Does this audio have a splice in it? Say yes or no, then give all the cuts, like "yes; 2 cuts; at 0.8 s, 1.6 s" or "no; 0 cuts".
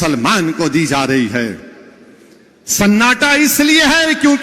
no; 0 cuts